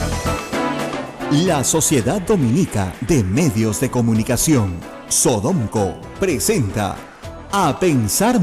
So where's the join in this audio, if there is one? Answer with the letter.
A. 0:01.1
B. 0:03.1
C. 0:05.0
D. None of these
A